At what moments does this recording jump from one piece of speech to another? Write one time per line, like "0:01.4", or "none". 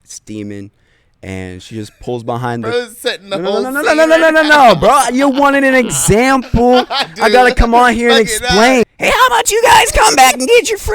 0:08.8